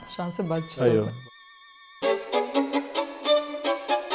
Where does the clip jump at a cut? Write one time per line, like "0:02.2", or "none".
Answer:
none